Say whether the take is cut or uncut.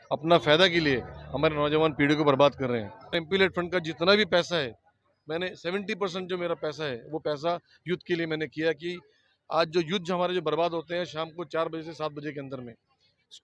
cut